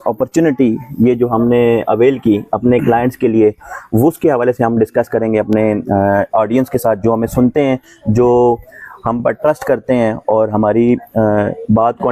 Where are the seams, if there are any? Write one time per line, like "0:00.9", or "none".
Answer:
none